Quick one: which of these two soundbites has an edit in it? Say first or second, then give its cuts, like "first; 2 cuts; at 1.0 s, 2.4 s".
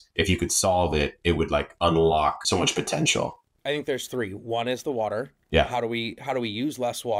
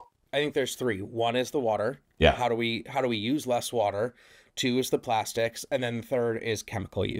first; 1 cut; at 2.4 s